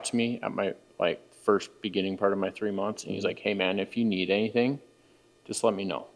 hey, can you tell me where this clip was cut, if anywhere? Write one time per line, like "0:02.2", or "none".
none